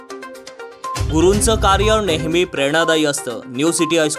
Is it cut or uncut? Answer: cut